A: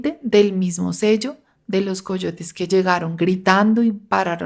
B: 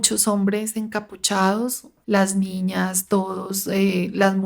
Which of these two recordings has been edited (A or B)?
B